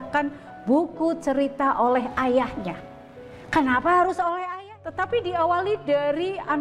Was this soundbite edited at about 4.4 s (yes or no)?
yes